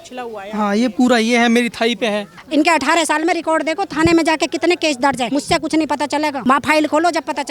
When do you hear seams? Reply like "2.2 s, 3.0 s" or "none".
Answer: 2.3 s, 5.3 s, 6.4 s